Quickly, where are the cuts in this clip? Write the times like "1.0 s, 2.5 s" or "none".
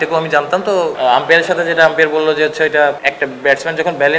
0.9 s, 3.0 s